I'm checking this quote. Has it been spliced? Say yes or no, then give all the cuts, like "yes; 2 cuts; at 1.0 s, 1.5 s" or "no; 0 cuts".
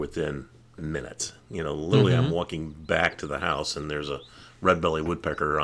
no; 0 cuts